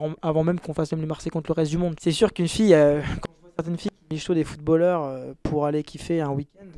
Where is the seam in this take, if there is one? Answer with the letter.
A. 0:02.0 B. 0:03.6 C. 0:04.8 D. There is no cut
A